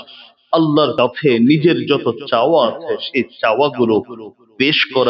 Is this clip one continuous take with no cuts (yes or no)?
no